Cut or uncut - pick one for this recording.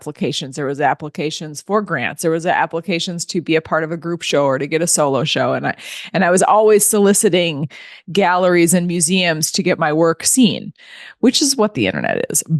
uncut